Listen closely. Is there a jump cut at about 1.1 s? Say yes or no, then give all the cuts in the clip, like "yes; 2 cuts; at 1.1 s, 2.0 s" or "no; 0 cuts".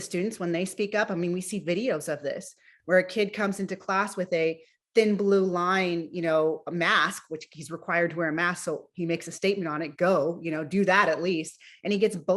no; 0 cuts